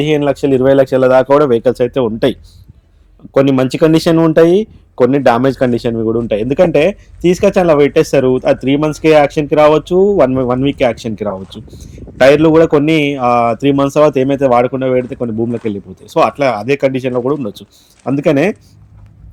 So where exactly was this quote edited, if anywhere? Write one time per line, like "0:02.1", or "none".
none